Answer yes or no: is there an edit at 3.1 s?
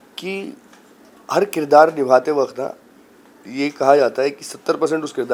no